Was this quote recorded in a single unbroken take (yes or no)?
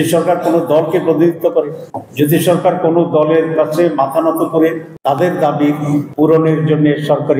no